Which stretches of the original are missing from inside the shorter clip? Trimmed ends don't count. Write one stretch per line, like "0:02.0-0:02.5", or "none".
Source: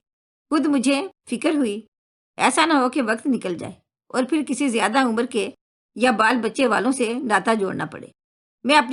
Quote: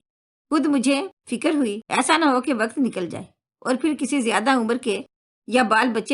0:01.9-0:02.3

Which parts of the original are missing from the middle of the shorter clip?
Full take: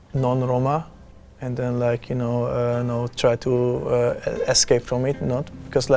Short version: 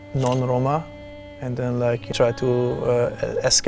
0:02.1-0:03.1

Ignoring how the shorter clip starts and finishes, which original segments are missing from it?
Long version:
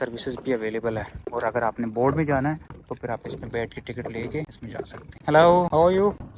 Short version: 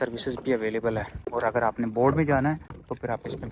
none

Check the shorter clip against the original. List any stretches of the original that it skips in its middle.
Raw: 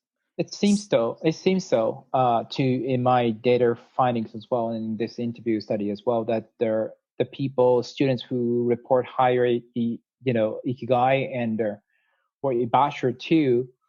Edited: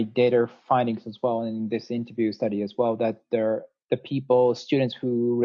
none

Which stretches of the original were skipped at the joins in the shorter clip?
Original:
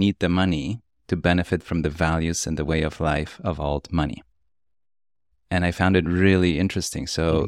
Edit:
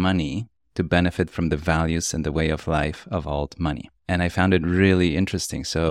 0:04.2-0:05.3

